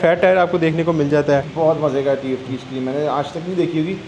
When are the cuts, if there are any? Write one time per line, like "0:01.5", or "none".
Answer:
0:01.5